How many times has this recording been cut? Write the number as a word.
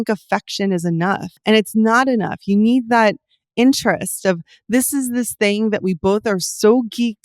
one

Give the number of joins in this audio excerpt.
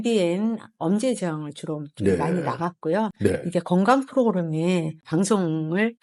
zero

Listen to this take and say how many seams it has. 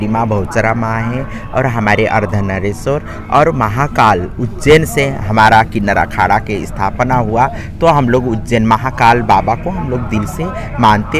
zero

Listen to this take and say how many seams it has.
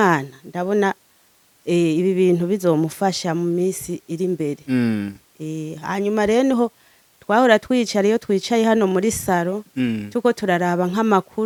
zero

